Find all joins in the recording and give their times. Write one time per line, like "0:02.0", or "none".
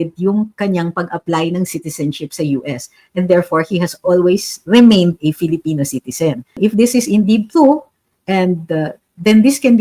0:06.6